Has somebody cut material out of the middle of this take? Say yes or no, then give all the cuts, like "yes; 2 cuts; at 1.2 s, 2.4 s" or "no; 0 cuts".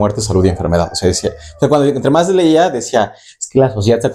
no; 0 cuts